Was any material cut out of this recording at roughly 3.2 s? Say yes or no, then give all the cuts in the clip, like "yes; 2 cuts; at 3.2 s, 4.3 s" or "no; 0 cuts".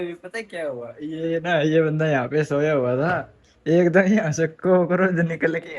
no; 0 cuts